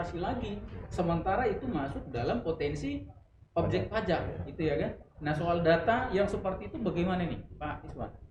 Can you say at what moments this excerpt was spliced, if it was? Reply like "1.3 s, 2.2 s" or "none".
none